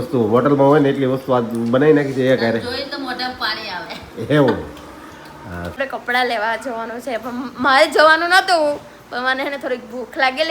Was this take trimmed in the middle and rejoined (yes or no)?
yes